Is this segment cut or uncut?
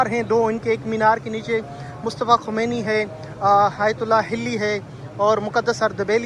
uncut